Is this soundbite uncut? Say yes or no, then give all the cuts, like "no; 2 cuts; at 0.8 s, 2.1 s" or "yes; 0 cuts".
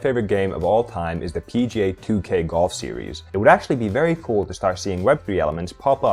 no; 1 cut; at 3.2 s